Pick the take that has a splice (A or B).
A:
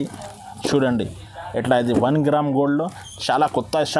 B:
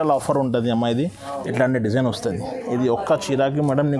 B